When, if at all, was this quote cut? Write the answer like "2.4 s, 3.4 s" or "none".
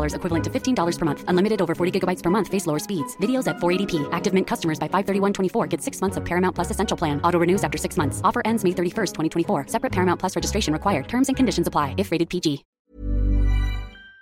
12.7 s